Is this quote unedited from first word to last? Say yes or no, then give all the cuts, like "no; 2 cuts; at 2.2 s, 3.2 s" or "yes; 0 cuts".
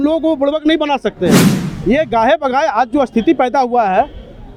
yes; 0 cuts